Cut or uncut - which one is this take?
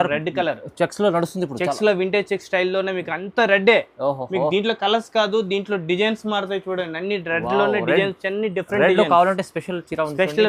uncut